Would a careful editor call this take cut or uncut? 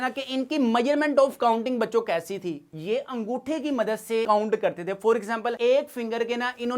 cut